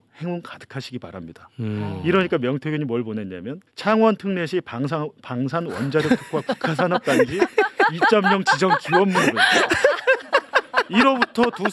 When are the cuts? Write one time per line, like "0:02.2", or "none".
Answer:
none